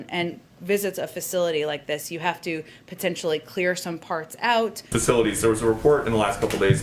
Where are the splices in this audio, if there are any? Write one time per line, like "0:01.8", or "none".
0:04.8